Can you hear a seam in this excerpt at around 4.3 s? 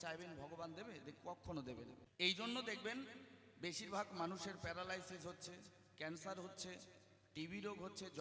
no; 1 cut; at 2.0 s

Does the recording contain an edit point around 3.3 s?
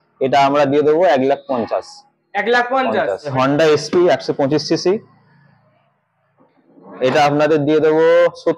yes; 1 cut; at 3.3 s

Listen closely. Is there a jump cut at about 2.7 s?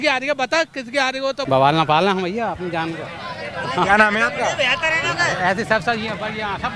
no; 1 cut; at 1.4 s

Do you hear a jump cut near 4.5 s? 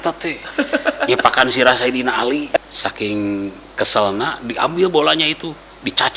no; 1 cut; at 2.6 s

